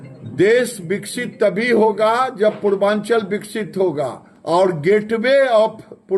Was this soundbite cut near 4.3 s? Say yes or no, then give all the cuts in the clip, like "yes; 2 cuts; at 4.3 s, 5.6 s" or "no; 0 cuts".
yes; 1 cut; at 4.3 s